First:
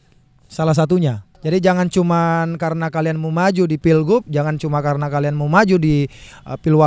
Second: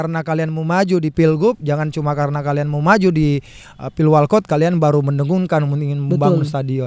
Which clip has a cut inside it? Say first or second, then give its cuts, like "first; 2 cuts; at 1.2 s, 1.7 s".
first; 1 cut; at 1.5 s